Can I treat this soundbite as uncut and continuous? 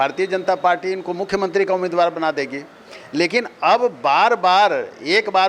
yes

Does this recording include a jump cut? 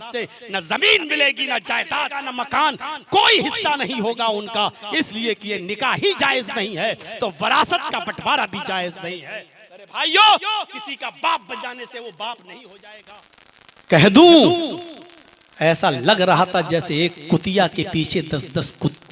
yes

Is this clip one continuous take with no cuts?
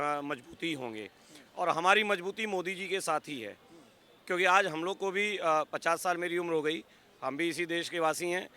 yes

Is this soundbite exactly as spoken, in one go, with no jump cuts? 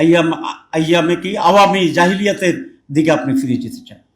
yes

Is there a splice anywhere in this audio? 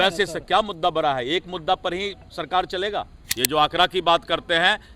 yes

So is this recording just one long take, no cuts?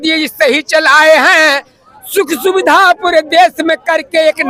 yes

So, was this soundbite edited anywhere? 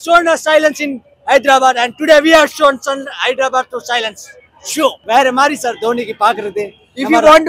no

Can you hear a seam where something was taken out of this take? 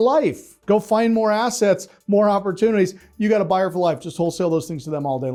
no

